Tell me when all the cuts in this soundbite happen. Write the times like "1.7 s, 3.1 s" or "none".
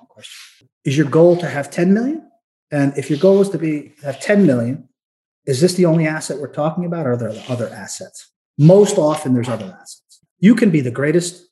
8.4 s, 10.2 s